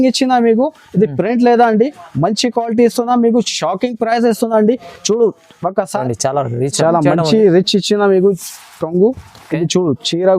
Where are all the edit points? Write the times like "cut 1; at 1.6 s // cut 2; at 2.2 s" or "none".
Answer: cut 1; at 6.0 s